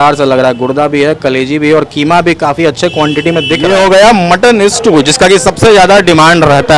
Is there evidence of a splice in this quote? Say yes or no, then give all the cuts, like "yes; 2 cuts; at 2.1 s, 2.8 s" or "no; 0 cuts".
yes; 1 cut; at 3.6 s